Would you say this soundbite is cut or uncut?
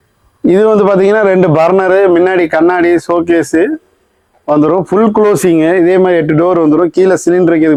uncut